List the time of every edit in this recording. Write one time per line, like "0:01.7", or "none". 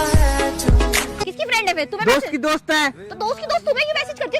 0:01.2